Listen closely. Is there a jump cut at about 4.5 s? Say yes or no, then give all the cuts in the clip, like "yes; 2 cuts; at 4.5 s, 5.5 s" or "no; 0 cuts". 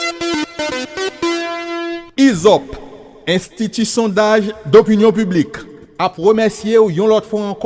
no; 1 cut; at 1.8 s